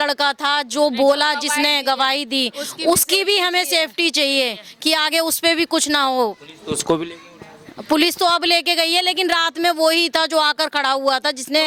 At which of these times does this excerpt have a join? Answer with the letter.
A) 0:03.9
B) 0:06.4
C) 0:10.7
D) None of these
D